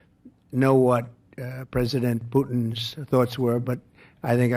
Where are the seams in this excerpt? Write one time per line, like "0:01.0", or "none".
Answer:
none